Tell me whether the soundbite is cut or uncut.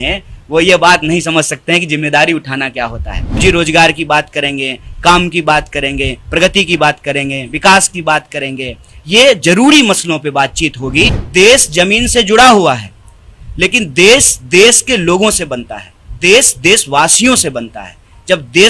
cut